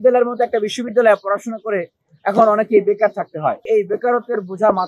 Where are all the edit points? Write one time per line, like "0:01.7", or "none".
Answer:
0:03.7